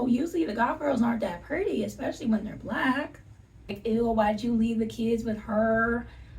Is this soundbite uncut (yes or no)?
no